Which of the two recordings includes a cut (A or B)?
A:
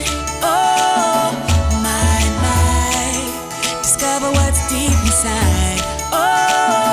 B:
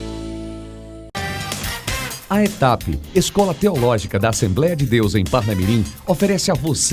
B